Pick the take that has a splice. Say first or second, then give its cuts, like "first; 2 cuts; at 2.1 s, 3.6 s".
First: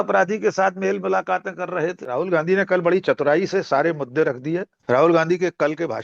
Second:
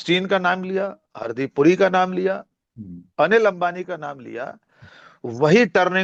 first; 2 cuts; at 2.0 s, 4.7 s